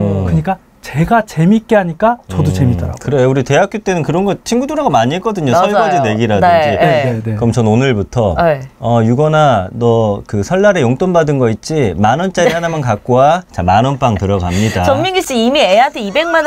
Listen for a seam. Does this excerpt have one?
no; 0 cuts

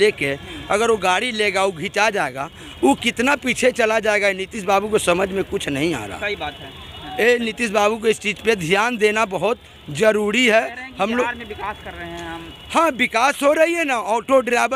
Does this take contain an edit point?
no; 0 cuts

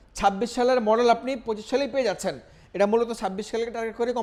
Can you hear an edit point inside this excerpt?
no; 0 cuts

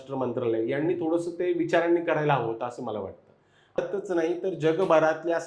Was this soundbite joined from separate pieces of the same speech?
yes; 1 cut; at 3.8 s

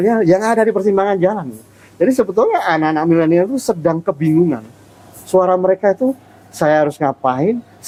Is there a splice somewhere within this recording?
no; 0 cuts

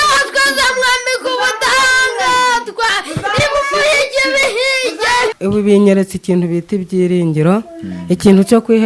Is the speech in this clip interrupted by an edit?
yes; 1 cut; at 5.4 s

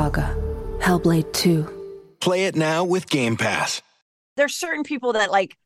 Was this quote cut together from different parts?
yes; 1 cut; at 4.4 s

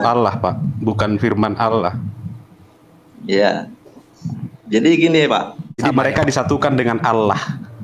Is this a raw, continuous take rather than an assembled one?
no; 1 cut; at 5.8 s

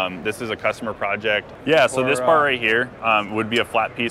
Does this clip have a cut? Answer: yes; 1 cut; at 1.5 s

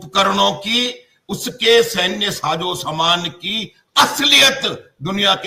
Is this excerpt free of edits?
yes; 0 cuts

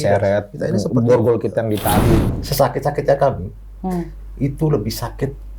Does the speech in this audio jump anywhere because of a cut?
yes; 1 cut; at 2.4 s

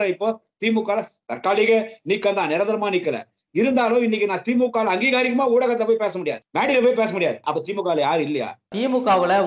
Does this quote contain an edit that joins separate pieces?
yes; 3 cuts; at 6.4 s, 7.4 s, 8.7 s

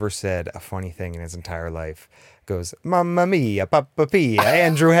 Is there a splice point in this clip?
no; 0 cuts

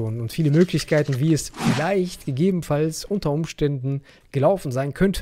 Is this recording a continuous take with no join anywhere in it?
yes; 0 cuts

